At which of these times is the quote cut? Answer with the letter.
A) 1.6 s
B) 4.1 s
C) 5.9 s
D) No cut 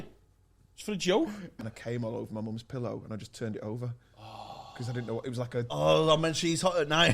A